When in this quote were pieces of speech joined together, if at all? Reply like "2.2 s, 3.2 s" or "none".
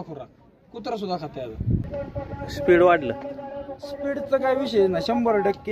2.0 s

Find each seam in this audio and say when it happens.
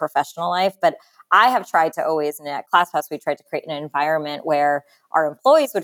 none

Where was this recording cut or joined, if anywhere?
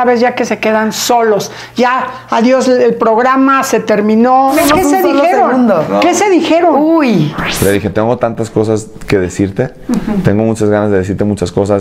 4.5 s, 7.4 s

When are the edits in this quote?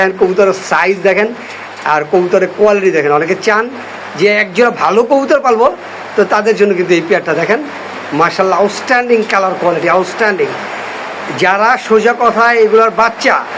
none

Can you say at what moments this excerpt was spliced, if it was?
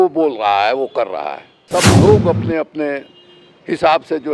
1.6 s

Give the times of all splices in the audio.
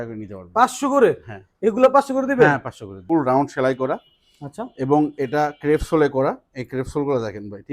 3.1 s

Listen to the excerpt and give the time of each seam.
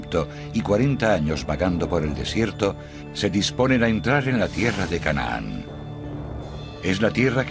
1.7 s

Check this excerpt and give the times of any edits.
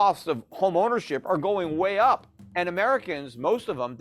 2.4 s

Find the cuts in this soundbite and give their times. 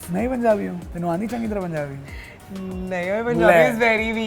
none

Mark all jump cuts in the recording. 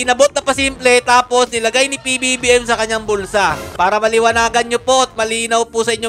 3.7 s

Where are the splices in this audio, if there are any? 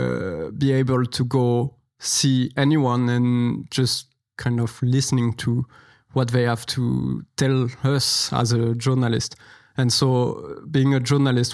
none

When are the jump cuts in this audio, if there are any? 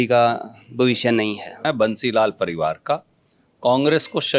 1.6 s

